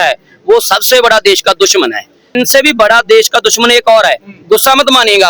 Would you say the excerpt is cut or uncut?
cut